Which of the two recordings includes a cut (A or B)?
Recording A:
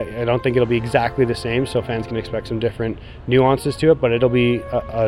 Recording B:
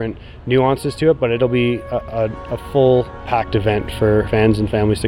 B